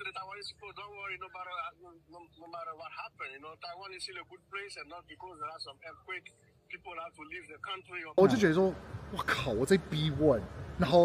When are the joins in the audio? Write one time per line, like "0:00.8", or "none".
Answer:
0:08.2